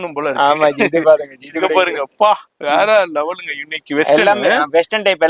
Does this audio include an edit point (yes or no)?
no